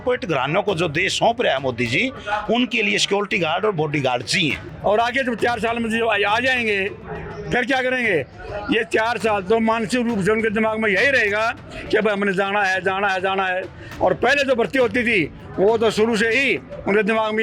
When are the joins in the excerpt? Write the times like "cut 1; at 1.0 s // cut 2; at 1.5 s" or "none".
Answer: cut 1; at 4.7 s